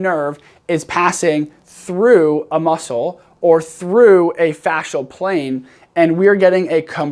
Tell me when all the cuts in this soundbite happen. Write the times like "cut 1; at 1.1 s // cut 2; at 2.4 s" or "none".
none